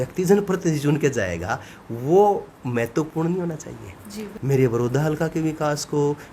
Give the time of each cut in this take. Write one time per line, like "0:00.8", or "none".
0:04.3